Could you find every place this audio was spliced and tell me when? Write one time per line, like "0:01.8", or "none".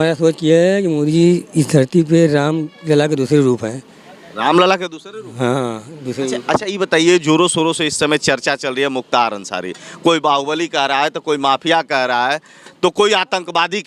none